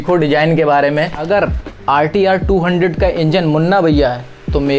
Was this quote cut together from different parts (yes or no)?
yes